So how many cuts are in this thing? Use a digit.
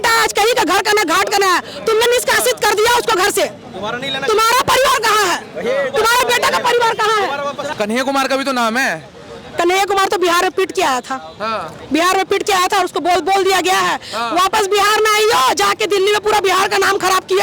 1